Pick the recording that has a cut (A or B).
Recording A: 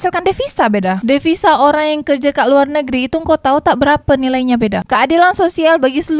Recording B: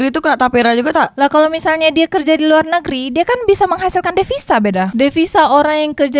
A